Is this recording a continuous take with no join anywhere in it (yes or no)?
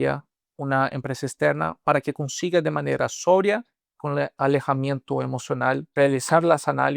no